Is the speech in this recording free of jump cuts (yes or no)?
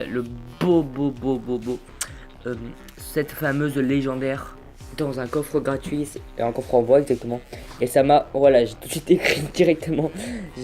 no